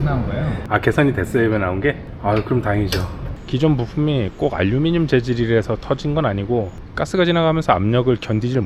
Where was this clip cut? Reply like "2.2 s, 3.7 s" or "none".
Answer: none

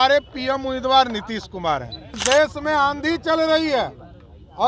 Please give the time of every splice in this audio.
2.2 s

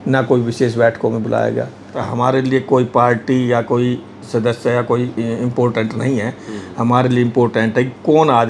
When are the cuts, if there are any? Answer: 2.0 s

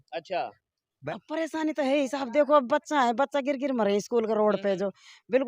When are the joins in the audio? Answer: 1.0 s

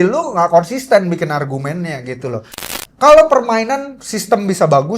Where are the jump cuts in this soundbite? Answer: 2.6 s

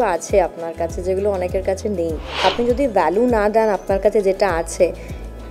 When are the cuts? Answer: 2.4 s

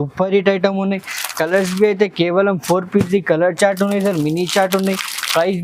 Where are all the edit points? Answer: none

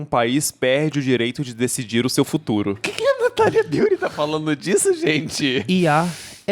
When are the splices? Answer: 2.9 s, 5.6 s

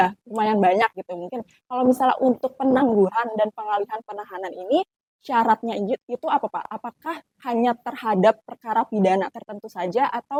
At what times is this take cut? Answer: none

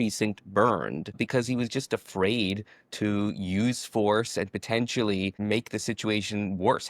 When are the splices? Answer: 1.2 s, 5.4 s

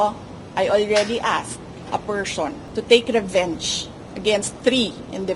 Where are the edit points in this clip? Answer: 1.7 s, 2.6 s, 4.6 s

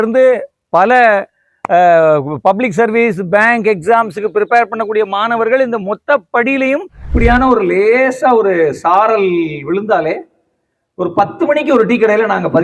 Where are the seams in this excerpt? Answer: 7.0 s

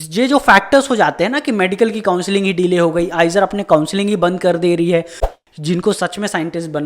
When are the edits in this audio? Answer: 5.2 s

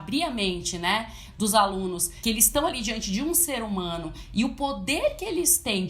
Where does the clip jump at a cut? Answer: 2.1 s

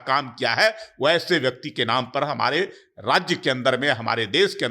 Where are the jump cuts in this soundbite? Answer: none

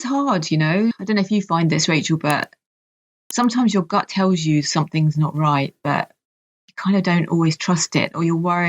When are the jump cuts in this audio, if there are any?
0.9 s

